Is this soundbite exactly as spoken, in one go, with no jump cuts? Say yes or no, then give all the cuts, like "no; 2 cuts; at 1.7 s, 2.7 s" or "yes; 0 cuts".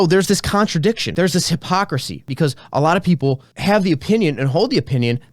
no; 3 cuts; at 1.1 s, 2.2 s, 3.5 s